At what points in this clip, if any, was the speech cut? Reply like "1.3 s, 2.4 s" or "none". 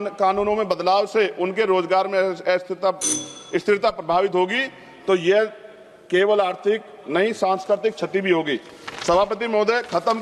none

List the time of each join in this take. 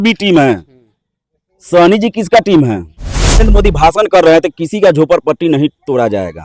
3.4 s

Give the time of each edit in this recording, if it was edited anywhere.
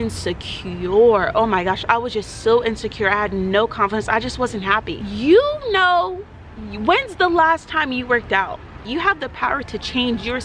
5.0 s, 8.8 s

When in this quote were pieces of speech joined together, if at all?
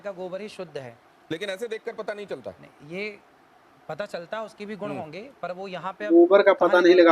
6.1 s

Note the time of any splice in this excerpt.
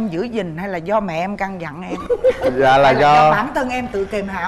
none

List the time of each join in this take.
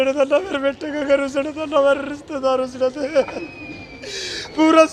none

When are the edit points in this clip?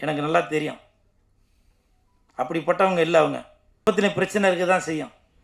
3.9 s

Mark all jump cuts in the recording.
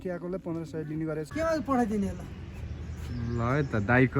1.3 s

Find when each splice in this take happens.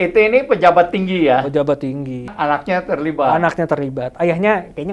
2.3 s

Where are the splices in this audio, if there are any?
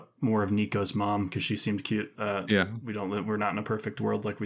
2.1 s

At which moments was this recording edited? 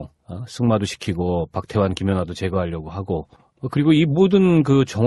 none

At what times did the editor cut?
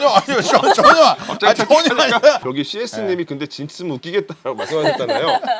2.5 s

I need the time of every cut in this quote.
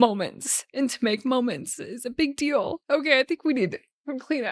2.8 s

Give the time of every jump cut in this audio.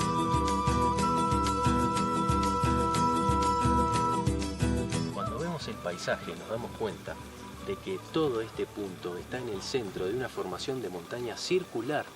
5.1 s

